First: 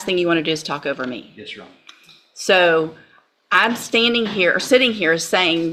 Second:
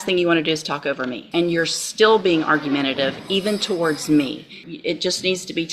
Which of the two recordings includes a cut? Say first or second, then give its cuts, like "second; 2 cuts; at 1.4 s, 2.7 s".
second; 2 cuts; at 1.2 s, 4.6 s